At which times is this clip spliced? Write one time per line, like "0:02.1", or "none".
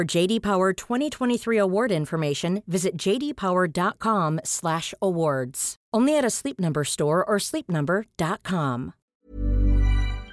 0:09.0